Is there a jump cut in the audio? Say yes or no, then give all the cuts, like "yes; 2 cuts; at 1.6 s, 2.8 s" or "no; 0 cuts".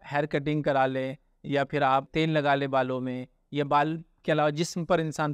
yes; 1 cut; at 2.1 s